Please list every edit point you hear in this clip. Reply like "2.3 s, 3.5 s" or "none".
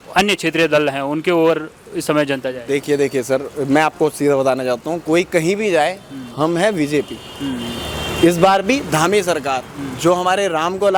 none